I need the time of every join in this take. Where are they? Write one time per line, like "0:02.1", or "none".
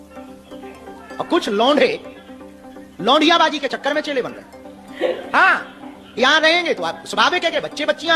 none

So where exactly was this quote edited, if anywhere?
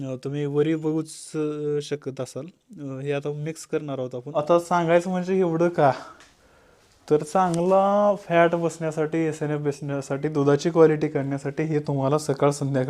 0:04.3

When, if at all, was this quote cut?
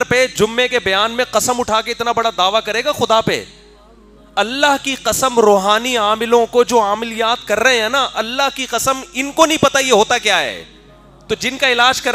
none

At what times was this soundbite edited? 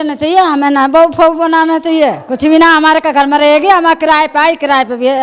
none

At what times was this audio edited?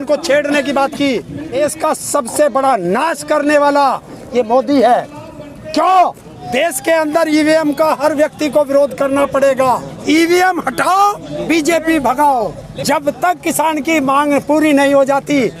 0:01.6
0:06.4
0:09.9
0:11.3
0:12.6

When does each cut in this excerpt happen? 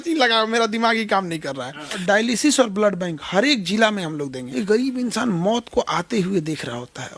0:01.9
0:04.4

